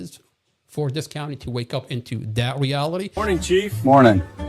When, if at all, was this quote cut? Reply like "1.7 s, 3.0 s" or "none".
3.1 s